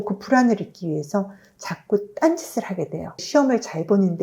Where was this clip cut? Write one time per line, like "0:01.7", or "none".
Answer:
0:03.2